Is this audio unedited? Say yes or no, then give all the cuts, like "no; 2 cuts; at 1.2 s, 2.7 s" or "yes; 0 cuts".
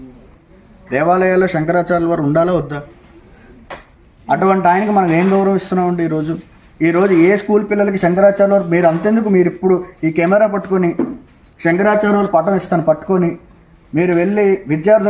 no; 1 cut; at 3.7 s